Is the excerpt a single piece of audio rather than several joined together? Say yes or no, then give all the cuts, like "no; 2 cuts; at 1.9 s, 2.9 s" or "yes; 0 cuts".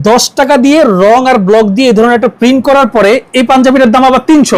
yes; 0 cuts